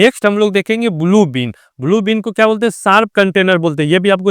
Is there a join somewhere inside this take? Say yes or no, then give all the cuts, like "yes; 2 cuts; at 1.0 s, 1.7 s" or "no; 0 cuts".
no; 0 cuts